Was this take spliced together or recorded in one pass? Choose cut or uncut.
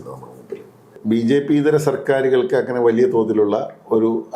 cut